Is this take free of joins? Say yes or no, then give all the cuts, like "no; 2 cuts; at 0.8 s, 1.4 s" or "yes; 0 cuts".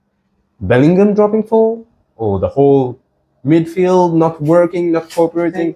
yes; 0 cuts